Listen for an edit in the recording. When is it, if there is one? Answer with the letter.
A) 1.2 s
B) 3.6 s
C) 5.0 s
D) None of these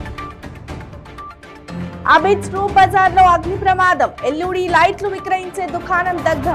A